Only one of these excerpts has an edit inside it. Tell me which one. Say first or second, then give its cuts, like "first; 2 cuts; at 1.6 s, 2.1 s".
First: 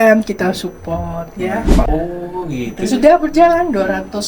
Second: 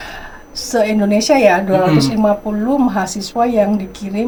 first; 1 cut; at 1.9 s